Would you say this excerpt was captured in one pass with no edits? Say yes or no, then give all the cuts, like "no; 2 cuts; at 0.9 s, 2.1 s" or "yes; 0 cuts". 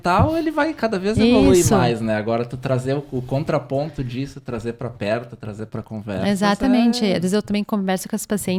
yes; 0 cuts